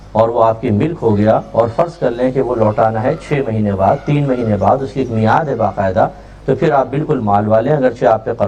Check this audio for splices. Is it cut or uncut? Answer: uncut